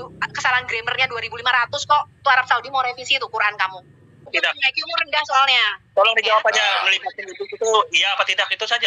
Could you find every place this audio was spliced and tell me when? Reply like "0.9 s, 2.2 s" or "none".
4.3 s